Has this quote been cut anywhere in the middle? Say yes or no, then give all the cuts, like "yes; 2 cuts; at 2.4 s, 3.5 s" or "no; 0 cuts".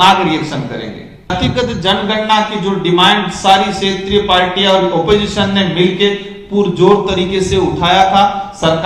yes; 1 cut; at 1.3 s